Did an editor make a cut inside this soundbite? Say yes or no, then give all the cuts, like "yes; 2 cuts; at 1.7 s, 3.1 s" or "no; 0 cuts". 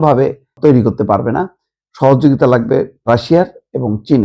yes; 1 cut; at 3.1 s